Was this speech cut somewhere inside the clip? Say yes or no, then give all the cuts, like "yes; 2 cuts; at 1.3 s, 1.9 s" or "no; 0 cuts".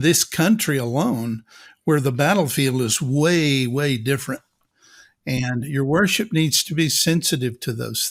no; 0 cuts